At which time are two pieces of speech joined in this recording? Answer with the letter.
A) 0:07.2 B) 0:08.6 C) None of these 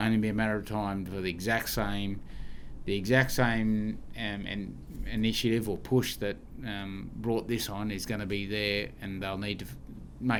C